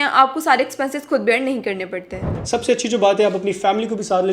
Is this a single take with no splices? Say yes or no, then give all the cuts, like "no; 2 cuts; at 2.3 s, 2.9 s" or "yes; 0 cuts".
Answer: no; 1 cut; at 2.3 s